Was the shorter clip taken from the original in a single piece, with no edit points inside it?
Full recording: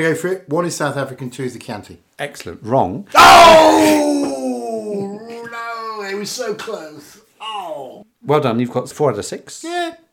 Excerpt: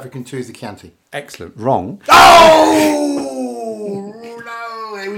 yes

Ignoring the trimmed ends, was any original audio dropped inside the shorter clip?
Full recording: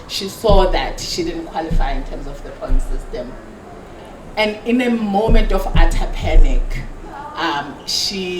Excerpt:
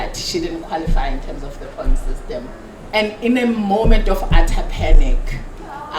yes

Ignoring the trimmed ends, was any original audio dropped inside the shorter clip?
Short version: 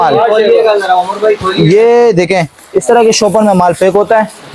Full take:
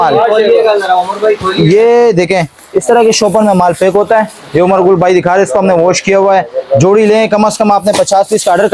no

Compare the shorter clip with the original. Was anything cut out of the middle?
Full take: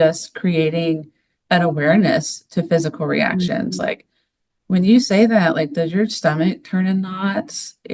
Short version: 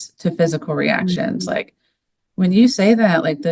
no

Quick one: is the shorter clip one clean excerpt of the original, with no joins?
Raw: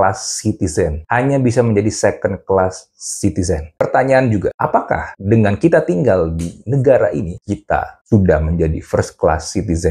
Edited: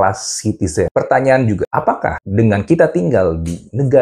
no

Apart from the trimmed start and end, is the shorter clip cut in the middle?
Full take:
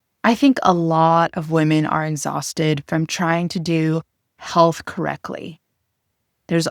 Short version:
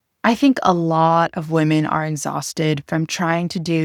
no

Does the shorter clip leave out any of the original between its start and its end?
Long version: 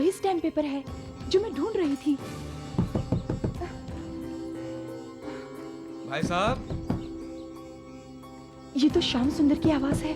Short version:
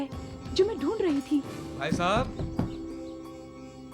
yes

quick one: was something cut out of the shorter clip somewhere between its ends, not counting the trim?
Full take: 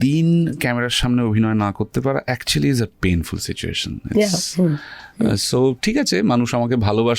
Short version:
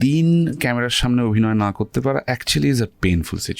no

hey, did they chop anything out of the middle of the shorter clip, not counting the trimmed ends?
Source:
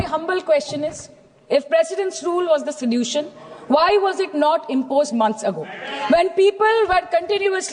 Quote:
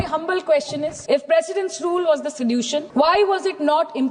yes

